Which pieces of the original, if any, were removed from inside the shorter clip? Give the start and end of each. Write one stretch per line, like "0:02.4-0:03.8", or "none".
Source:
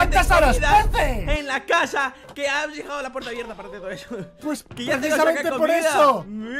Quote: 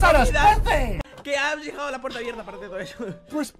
0:01.3-0:02.1